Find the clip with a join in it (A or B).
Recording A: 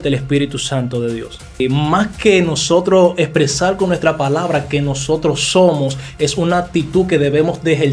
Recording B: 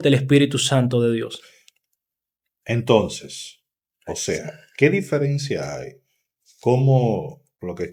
A